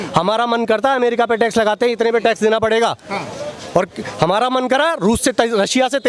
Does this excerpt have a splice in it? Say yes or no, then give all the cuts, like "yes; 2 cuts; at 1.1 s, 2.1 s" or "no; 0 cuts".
no; 0 cuts